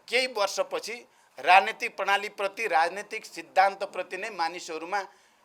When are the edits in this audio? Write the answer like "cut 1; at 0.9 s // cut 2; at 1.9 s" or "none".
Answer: none